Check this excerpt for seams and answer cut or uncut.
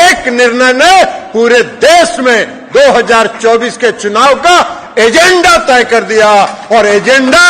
uncut